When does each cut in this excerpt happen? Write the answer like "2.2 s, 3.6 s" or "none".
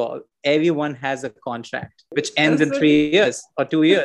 2.0 s